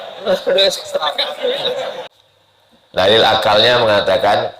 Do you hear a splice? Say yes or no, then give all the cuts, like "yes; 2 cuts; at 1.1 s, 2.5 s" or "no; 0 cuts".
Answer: yes; 1 cut; at 2.0 s